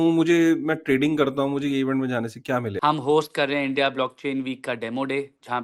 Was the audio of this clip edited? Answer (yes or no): yes